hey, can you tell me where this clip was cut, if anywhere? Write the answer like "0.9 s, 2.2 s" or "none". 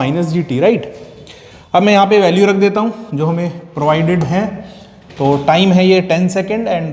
none